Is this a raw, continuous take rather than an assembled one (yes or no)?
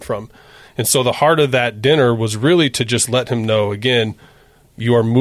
yes